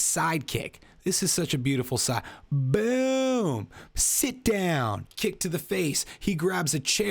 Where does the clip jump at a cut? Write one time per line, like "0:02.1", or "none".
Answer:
0:05.1